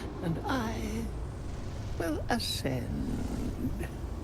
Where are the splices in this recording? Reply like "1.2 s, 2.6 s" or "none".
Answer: none